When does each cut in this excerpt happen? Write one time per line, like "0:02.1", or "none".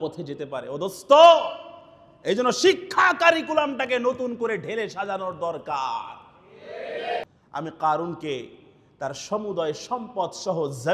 0:07.2